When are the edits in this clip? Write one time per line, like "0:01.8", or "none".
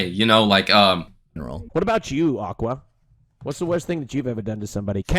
0:01.1